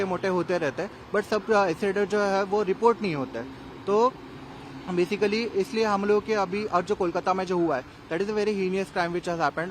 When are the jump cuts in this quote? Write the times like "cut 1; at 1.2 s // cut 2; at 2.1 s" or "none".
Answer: none

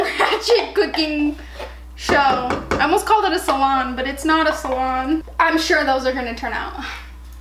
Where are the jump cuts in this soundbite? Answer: cut 1; at 5.3 s

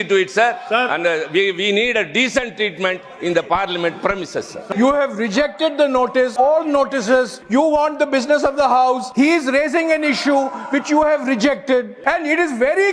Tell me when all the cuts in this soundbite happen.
cut 1; at 4.6 s // cut 2; at 6.3 s // cut 3; at 7.4 s // cut 4; at 9.1 s // cut 5; at 11.9 s

